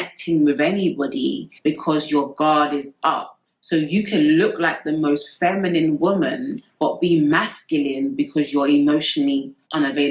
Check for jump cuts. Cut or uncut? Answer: uncut